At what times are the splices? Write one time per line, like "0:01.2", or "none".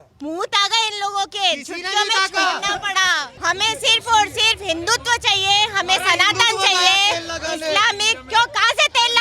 0:03.3